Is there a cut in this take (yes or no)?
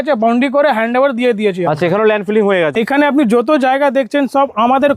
yes